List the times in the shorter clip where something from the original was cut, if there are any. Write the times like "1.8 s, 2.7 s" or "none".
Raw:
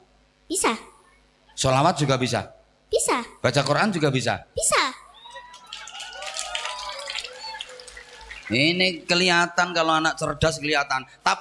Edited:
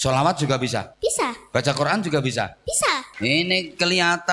0.9 s, 3.1 s